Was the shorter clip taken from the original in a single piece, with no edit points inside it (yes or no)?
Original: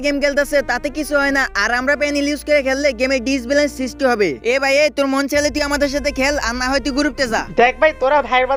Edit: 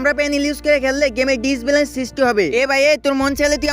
no